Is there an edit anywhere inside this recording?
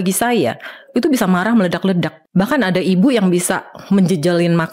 yes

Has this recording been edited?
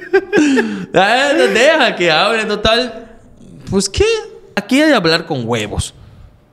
yes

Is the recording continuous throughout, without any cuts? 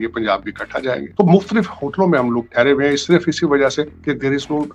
yes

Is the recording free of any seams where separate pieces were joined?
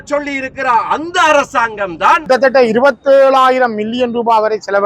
no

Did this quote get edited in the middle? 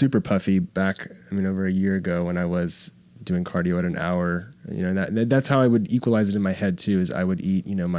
no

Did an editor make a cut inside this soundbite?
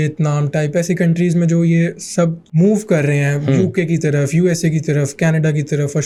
no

